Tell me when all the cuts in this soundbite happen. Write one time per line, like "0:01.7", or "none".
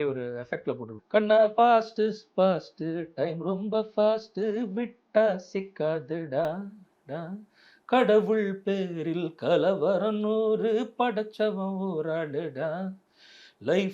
0:00.9